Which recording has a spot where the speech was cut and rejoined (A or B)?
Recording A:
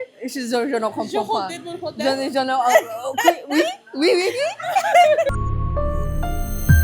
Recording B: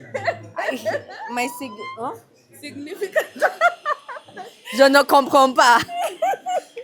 A